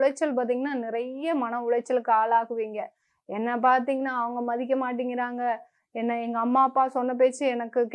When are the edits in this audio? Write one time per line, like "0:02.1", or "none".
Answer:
none